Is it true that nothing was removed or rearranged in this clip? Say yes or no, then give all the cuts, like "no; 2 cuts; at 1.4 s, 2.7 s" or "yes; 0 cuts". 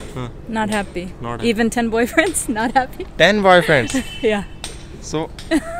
yes; 0 cuts